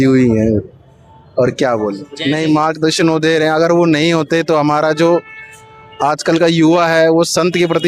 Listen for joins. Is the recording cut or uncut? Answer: cut